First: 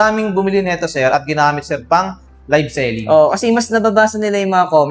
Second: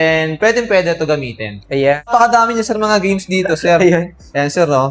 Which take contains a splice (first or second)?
second